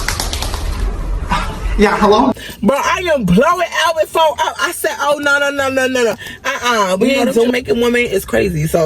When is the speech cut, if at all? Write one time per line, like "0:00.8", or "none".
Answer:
0:07.5